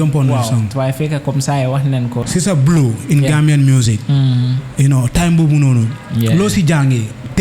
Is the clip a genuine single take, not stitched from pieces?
no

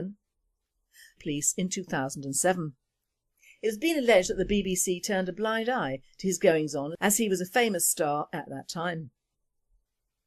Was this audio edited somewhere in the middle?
no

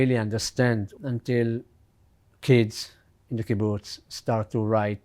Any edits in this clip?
yes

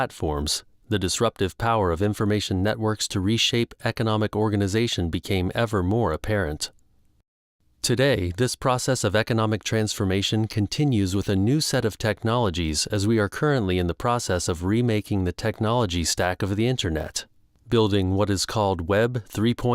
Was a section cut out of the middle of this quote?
yes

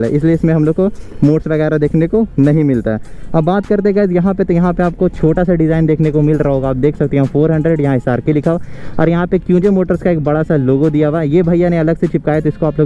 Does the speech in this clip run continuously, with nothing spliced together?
yes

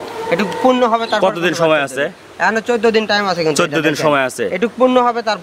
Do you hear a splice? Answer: no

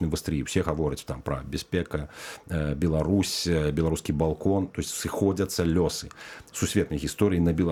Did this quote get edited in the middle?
no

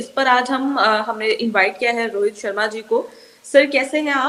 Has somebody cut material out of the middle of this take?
no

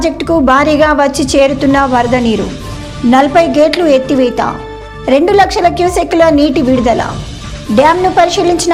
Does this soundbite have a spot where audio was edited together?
no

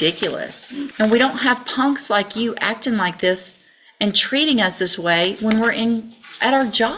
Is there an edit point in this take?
yes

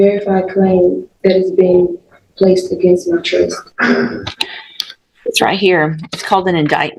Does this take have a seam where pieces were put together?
no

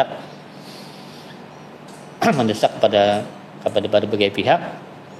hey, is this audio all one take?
yes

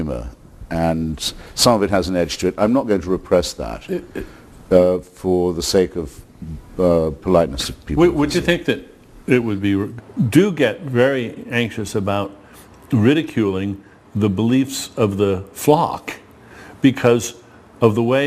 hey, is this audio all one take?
yes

